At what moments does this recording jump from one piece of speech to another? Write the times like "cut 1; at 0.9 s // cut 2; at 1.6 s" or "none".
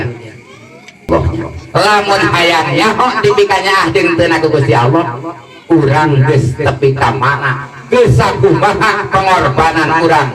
cut 1; at 1.1 s